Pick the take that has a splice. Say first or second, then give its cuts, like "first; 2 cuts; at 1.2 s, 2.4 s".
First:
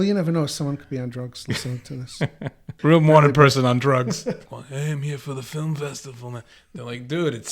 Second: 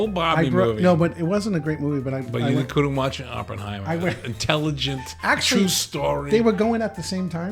first; 2 cuts; at 2.8 s, 4.4 s